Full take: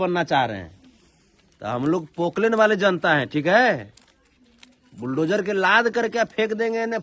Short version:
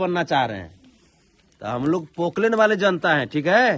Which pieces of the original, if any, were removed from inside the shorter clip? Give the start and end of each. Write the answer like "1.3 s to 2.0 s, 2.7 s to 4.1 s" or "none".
none